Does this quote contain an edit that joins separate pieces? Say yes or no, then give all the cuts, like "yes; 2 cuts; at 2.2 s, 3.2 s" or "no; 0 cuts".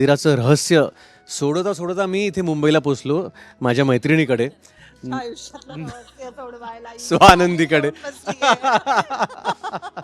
no; 0 cuts